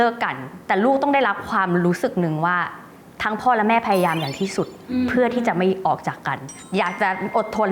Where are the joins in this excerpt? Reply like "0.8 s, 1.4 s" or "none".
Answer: none